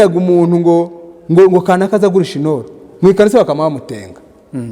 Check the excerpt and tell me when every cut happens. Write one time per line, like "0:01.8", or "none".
none